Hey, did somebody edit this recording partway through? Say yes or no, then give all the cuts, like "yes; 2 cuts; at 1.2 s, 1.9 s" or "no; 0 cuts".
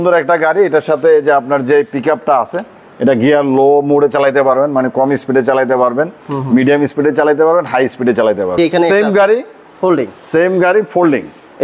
yes; 1 cut; at 8.6 s